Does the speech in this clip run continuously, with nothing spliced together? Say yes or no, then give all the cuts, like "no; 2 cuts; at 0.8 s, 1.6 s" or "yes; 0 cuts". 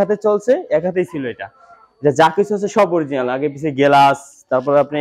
yes; 0 cuts